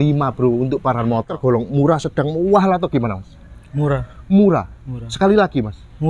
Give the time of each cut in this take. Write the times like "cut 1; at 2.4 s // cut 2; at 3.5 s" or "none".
cut 1; at 1.3 s

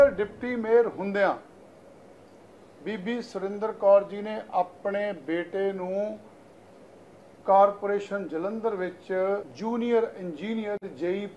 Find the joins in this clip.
cut 1; at 9.5 s

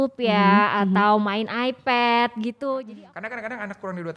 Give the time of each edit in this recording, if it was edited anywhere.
cut 1; at 2.8 s

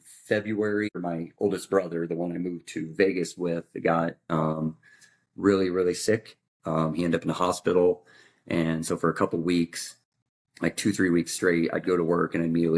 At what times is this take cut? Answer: cut 1; at 0.9 s

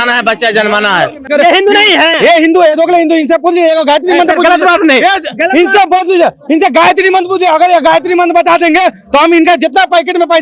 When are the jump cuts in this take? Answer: cut 1; at 1.3 s

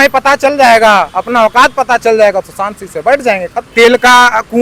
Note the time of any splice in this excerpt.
cut 1; at 3.6 s

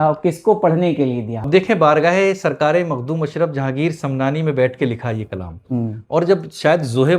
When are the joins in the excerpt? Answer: cut 1; at 1.3 s

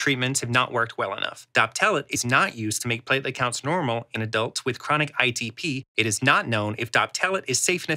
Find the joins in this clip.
cut 1; at 1.3 s // cut 2; at 2.1 s // cut 3; at 4.1 s // cut 4; at 5.9 s

